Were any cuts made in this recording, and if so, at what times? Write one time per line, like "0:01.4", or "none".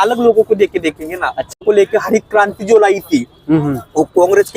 0:01.6